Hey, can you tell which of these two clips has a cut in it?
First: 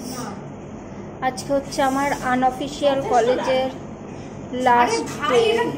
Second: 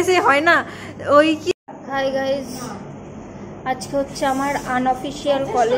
second; 1 cut; at 1.5 s

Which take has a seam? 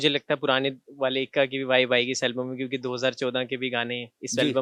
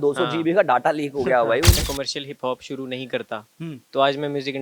second; 1 cut; at 1.8 s

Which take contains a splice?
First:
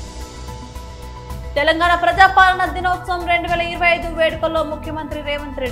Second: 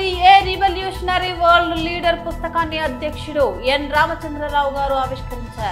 first; 1 cut; at 1.5 s

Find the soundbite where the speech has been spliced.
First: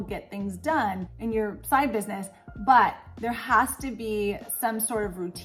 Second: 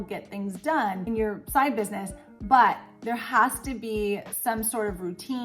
second; 1 cut; at 1.0 s

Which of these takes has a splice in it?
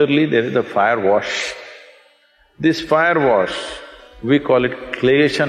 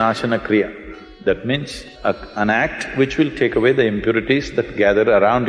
second; 1 cut; at 1.8 s

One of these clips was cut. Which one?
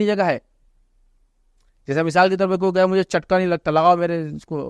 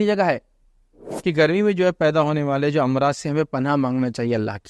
second; 1 cut; at 1.0 s

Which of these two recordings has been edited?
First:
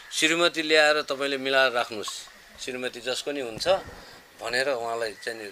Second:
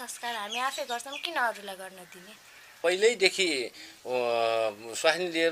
second; 1 cut; at 2.8 s

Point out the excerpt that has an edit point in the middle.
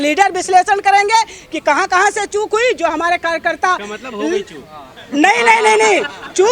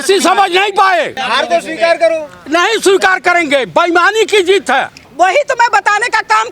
second; 2 cuts; at 1.2 s, 5.0 s

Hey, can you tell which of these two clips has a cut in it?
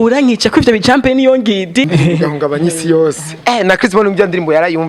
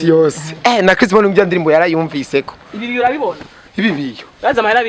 first; 1 cut; at 1.9 s

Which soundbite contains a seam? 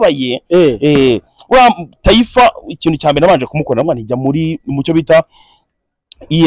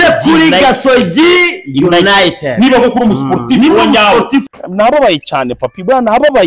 second; 1 cut; at 4.5 s

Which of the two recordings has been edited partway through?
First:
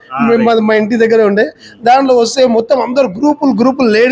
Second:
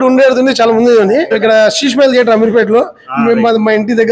second; 1 cut; at 1.3 s

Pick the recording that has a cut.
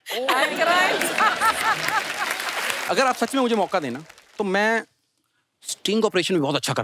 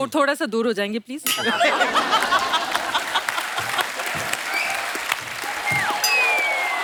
first; 1 cut; at 2.8 s

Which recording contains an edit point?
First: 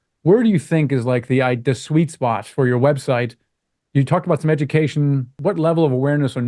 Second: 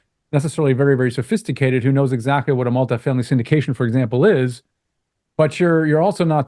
first; 1 cut; at 5.4 s

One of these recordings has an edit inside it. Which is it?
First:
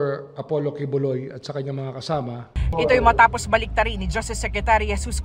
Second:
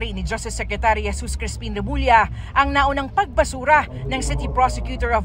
first; 1 cut; at 2.6 s

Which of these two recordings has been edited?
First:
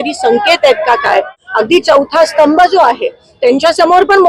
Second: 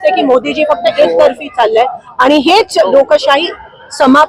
first; 1 cut; at 1.4 s

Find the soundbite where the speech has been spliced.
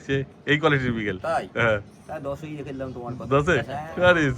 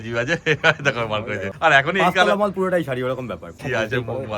second; 2 cuts; at 1.5 s, 3.6 s

